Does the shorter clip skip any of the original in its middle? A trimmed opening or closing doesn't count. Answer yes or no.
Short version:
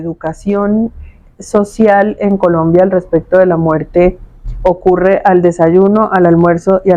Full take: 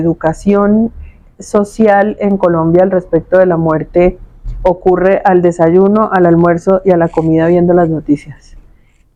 no